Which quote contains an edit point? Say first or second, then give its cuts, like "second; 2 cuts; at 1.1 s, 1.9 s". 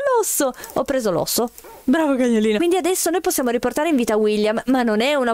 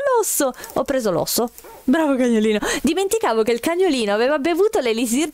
first; 1 cut; at 2.6 s